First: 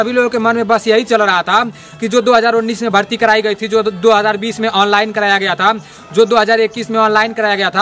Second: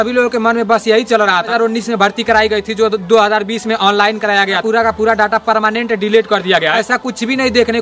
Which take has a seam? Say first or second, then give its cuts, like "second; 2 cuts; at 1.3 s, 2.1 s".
second; 3 cuts; at 1.5 s, 4.6 s, 6.8 s